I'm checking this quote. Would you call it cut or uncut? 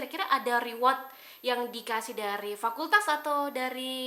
uncut